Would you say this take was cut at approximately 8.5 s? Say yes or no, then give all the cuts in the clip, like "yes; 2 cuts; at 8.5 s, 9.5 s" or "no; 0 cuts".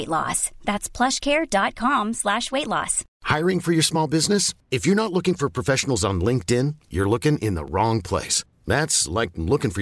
no; 0 cuts